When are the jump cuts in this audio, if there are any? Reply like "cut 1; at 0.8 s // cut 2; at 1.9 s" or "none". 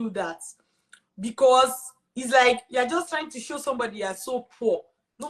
none